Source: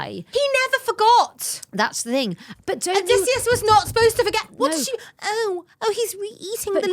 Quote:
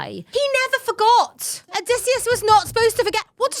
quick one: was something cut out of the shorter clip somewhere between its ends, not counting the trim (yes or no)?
yes